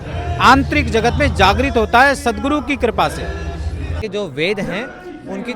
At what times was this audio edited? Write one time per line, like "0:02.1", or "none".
0:04.0